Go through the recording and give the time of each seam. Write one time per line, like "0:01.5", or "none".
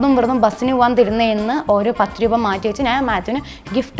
none